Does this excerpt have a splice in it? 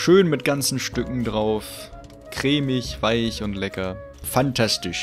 yes; 1 cut; at 4.1 s

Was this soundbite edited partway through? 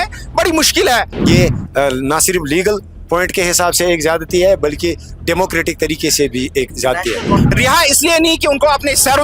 yes; 2 cuts; at 1.1 s, 7.5 s

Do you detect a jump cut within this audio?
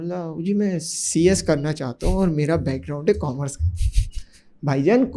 no; 0 cuts

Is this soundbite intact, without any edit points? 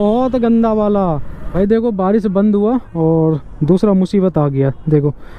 no; 1 cut; at 1.4 s

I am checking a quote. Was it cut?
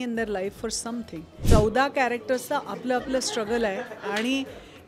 yes; 1 cut; at 1.5 s

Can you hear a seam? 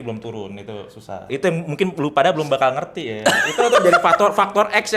yes; 1 cut; at 1.3 s

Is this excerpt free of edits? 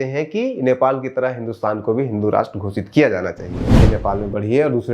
no; 1 cut; at 3.8 s

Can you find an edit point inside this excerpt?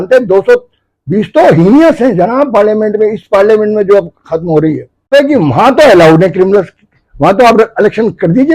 yes; 1 cut; at 5.1 s

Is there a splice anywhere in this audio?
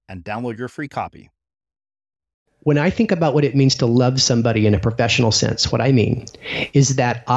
yes; 1 cut; at 2.4 s

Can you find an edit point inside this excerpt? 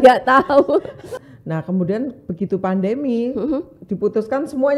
yes; 1 cut; at 1.1 s

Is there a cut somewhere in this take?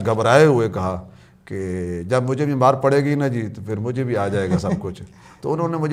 no; 0 cuts

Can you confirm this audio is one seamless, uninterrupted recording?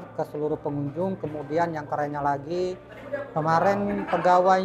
yes; 0 cuts

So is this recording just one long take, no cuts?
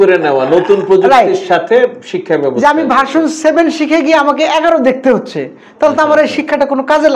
yes; 0 cuts

